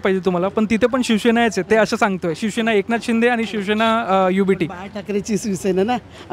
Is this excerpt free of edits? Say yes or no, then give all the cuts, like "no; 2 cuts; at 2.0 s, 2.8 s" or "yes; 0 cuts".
yes; 0 cuts